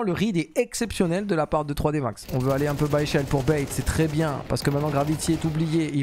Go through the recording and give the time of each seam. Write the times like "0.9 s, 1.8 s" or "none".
2.2 s